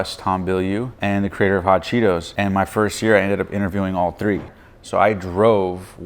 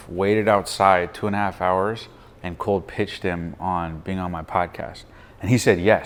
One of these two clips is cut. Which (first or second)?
first